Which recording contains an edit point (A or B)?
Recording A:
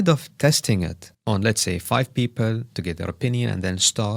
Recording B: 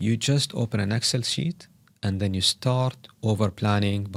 A